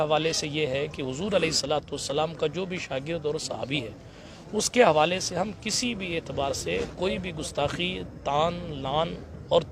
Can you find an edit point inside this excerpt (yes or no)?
no